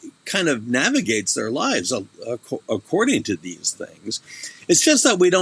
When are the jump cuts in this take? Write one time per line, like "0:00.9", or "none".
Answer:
none

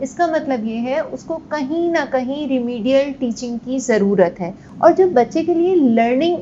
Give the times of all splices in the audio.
0:04.6

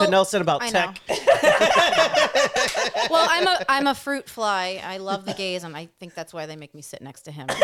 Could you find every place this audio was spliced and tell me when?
none

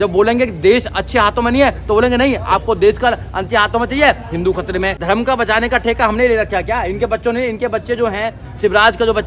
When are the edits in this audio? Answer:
0:05.0

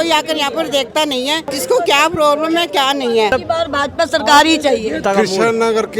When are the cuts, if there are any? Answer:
0:01.5
0:03.3
0:05.0

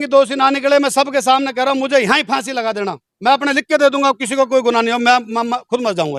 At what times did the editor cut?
none

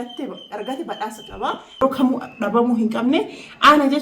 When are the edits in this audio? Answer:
0:01.8

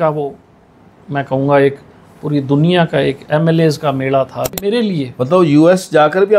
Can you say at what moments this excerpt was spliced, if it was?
0:04.6

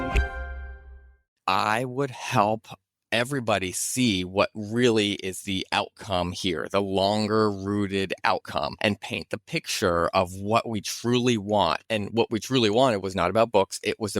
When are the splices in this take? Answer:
0:01.4

